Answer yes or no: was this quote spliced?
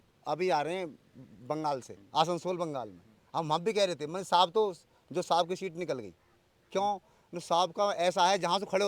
yes